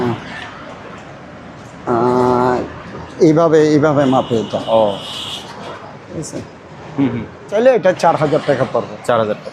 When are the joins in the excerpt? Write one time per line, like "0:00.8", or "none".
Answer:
0:07.5